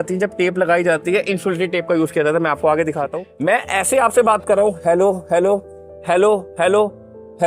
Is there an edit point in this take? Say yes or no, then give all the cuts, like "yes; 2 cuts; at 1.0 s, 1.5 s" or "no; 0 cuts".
yes; 1 cut; at 3.2 s